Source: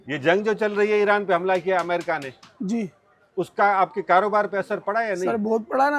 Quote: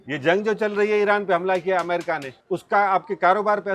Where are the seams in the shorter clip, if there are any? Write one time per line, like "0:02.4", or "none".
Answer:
0:02.3